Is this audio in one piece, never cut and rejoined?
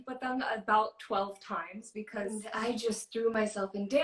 no; 1 cut; at 2.5 s

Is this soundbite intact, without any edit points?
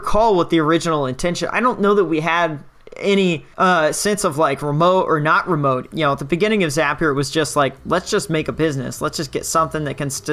no; 2 cuts; at 3.5 s, 5.9 s

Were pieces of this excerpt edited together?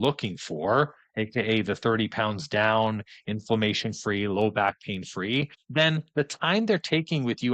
no; 0 cuts

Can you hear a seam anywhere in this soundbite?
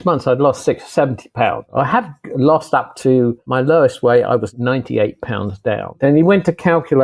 yes; 4 cuts; at 1.7 s, 3.4 s, 4.5 s, 6.0 s

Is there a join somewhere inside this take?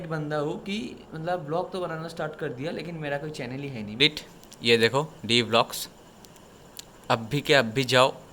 yes; 1 cut; at 3.9 s

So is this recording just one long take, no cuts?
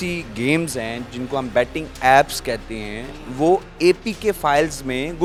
yes; 0 cuts

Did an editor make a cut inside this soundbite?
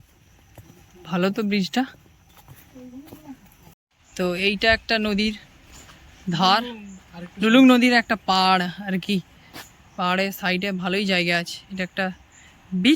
yes; 1 cut; at 4.0 s

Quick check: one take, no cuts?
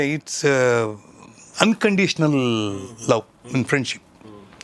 yes; 0 cuts

